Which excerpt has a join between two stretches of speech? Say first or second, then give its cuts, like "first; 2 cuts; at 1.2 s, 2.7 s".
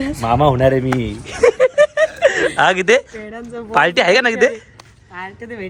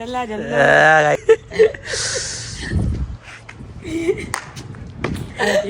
second; 1 cut; at 1.2 s